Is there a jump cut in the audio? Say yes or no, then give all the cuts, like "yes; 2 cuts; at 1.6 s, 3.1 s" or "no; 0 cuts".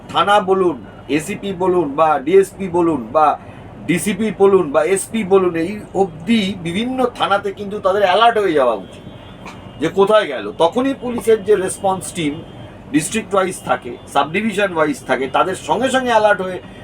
no; 0 cuts